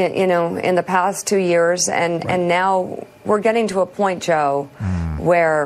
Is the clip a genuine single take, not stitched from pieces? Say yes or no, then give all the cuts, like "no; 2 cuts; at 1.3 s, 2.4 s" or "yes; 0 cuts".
no; 1 cut; at 2.3 s